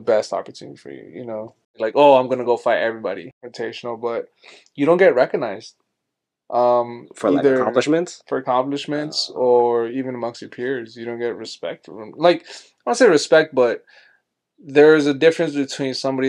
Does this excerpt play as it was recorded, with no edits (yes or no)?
no